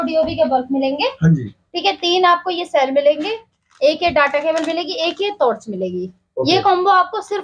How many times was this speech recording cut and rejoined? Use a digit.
0